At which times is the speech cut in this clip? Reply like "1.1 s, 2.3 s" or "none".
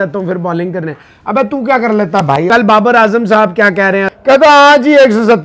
2.5 s, 4.1 s

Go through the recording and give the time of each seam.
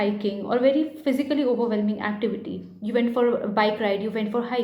none

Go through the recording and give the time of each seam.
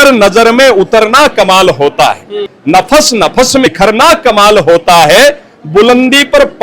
2.5 s, 3.7 s

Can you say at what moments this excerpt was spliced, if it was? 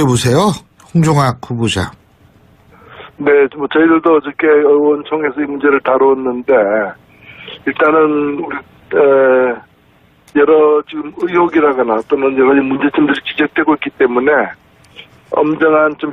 4.4 s

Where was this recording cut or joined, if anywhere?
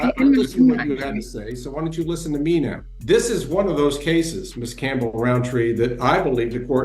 2.9 s

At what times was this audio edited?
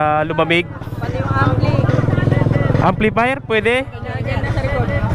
none

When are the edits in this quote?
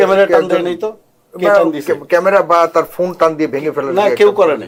none

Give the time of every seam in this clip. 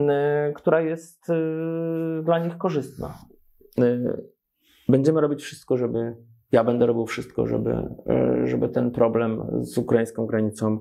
3.8 s

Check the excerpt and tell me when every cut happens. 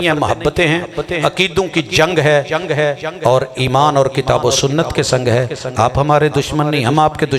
none

